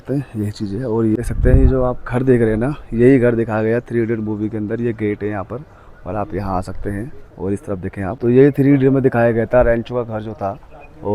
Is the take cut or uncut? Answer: cut